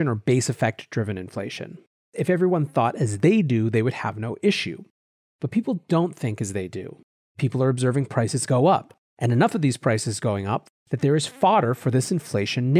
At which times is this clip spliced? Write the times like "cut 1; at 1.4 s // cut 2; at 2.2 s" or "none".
cut 1; at 2.1 s // cut 2; at 10.6 s